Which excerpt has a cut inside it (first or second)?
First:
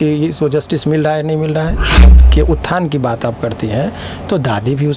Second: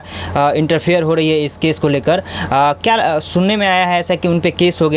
first